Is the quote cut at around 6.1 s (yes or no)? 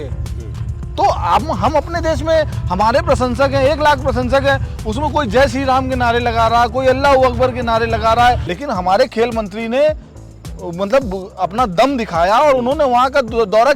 no